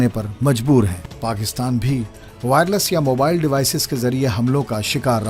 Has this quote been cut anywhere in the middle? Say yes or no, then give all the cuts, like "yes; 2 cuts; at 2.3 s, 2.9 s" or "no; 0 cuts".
yes; 1 cut; at 1.0 s